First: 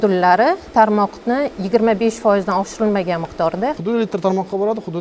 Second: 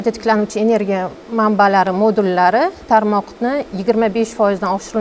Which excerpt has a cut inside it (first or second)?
first